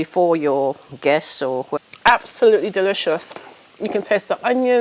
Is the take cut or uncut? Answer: cut